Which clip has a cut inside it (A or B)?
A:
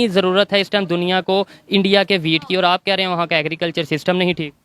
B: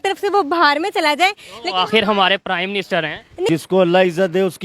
B